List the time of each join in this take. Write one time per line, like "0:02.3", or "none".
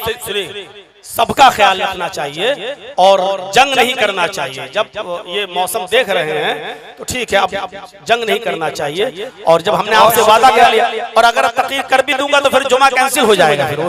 none